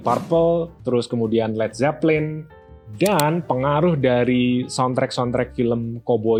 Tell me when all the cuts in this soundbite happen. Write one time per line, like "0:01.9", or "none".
none